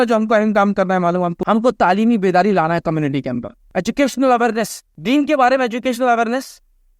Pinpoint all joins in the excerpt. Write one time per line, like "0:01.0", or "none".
0:01.4
0:03.5
0:04.8

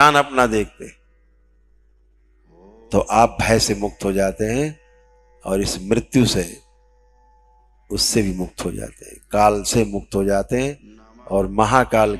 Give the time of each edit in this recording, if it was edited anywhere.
none

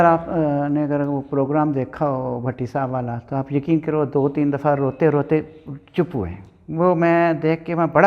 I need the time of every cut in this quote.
none

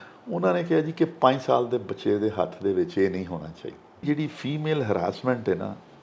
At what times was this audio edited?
0:04.0

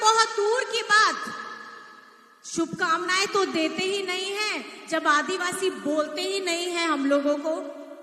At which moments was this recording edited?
none

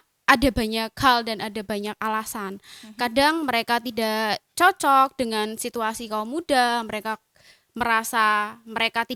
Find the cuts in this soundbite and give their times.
none

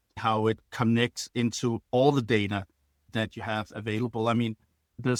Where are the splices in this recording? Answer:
none

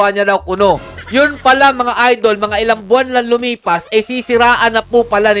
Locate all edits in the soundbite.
0:00.9

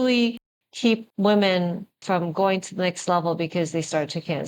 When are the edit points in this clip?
0:01.1
0:01.9

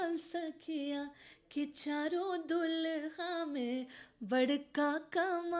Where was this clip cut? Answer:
none

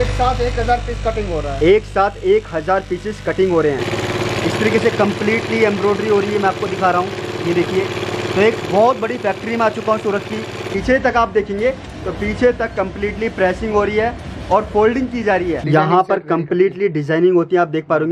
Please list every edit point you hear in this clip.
0:03.9
0:10.7
0:15.6

